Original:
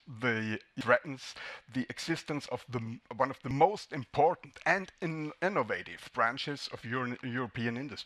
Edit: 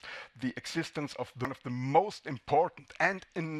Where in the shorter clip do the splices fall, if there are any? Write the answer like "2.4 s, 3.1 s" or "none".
1.7 s